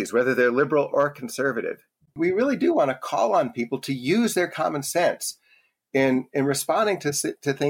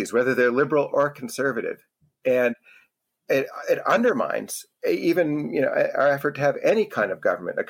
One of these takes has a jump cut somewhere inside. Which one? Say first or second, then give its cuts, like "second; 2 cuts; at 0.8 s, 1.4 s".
first; 1 cut; at 2.2 s